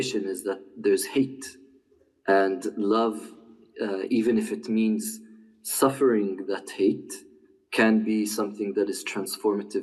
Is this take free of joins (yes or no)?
yes